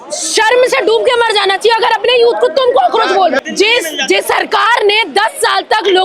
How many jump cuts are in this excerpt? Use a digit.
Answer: 1